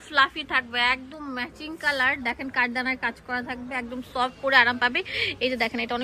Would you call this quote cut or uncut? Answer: uncut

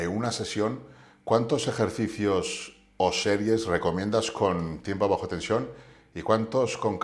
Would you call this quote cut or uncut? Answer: uncut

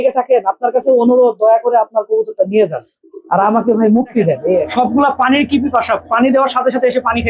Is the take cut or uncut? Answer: cut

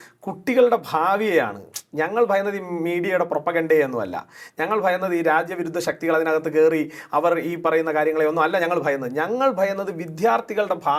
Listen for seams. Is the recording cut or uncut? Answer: uncut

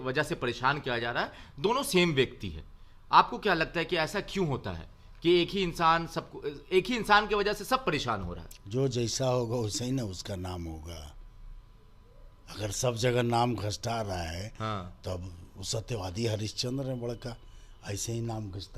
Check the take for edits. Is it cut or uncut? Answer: uncut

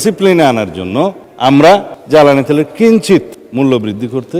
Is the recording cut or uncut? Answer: uncut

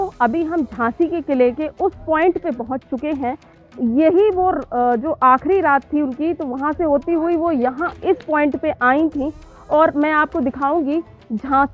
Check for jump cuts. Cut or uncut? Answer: cut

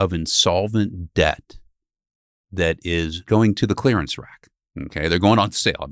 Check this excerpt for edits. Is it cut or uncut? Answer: cut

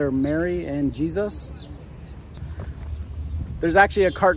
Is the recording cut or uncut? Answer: cut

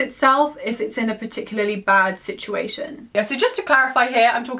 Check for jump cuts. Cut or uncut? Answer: uncut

